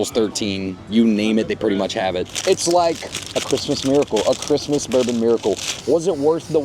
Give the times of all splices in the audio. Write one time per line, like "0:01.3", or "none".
0:02.3
0:05.7